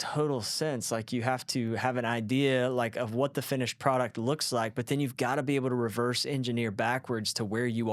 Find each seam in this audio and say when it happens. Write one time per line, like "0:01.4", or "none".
none